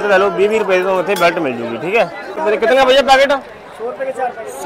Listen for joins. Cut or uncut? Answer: uncut